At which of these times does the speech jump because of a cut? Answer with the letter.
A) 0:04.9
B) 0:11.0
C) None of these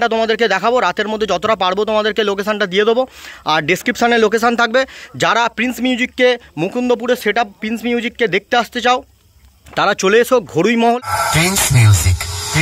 B